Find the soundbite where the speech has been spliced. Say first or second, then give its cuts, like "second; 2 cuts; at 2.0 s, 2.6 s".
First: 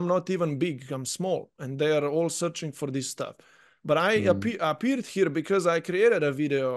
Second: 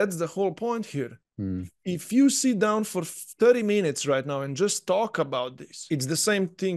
second; 1 cut; at 5.9 s